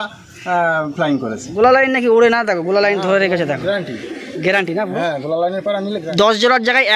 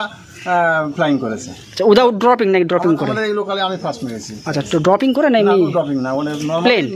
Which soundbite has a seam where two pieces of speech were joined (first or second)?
first